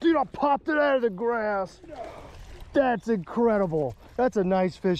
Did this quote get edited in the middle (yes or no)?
no